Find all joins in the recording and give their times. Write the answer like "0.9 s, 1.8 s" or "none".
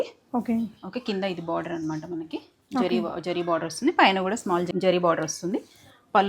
4.7 s